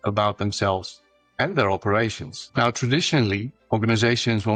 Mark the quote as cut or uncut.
uncut